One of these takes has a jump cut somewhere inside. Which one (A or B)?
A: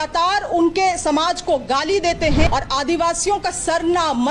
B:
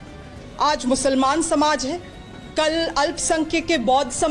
A